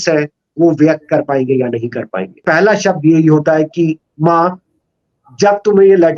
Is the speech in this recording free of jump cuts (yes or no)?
no